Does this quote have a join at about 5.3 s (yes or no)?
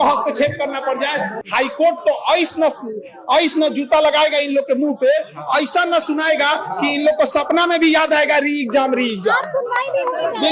no